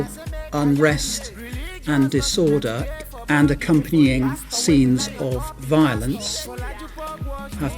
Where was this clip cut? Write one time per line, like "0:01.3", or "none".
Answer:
0:02.8